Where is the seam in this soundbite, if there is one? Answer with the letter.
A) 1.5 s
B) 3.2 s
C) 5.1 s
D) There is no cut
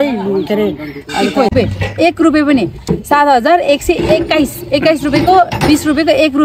A